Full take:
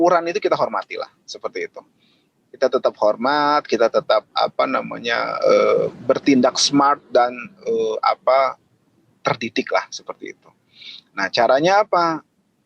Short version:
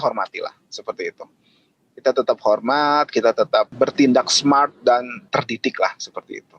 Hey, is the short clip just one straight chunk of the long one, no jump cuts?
no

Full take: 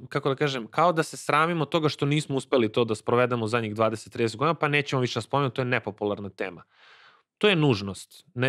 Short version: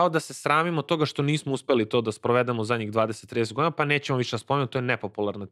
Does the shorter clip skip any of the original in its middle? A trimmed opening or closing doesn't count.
no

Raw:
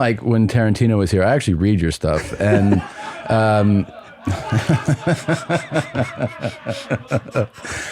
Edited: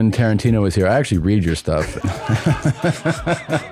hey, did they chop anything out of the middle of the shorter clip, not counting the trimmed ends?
yes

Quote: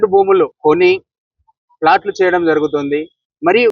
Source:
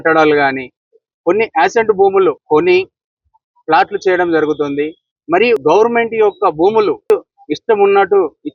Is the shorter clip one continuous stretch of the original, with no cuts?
yes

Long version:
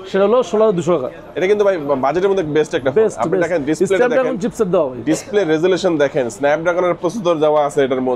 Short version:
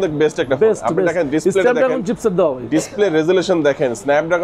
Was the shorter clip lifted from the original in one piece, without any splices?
yes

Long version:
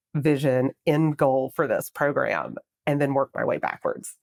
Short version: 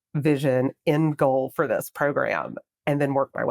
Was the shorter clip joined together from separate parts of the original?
no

